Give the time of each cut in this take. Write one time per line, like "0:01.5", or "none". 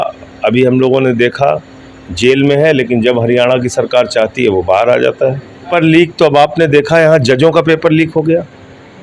0:05.7